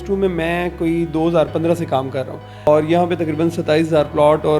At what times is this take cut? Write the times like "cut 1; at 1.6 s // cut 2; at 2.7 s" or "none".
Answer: cut 1; at 2.7 s